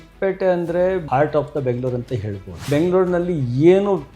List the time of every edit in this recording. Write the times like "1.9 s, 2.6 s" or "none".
1.0 s, 2.7 s